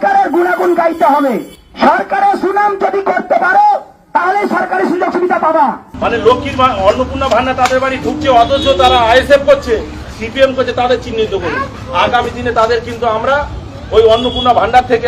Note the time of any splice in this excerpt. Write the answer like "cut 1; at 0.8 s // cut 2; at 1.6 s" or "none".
cut 1; at 1.6 s // cut 2; at 5.9 s